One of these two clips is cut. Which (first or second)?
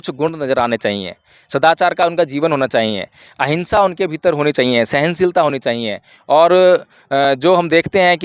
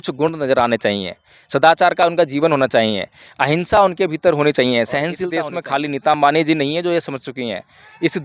second